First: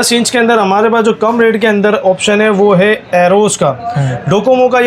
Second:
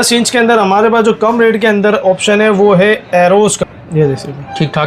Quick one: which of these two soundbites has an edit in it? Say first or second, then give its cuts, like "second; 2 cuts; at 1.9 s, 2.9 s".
second; 1 cut; at 3.6 s